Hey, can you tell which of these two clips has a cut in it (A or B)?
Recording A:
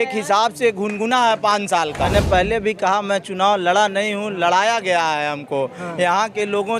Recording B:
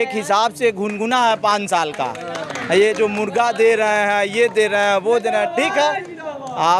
A